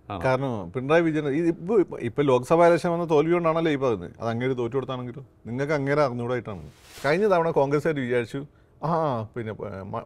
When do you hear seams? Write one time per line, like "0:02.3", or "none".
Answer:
0:06.9